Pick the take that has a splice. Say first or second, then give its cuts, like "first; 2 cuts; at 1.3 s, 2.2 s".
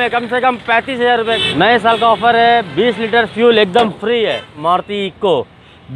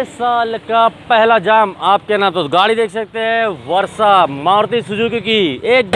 first; 2 cuts; at 1.4 s, 4.6 s